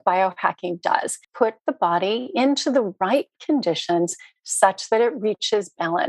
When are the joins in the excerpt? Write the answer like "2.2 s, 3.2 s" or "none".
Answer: 1.2 s